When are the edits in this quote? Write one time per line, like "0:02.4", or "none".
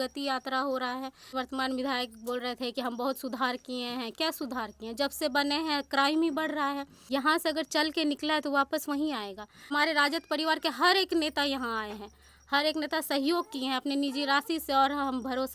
0:01.3
0:06.9
0:09.7